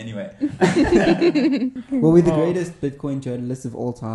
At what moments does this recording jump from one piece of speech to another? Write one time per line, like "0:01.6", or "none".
0:01.8